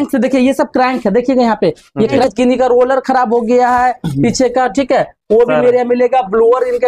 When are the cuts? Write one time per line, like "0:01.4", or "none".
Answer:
0:02.2